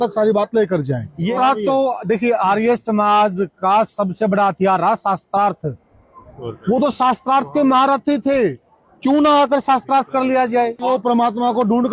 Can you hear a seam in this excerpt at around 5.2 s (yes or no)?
no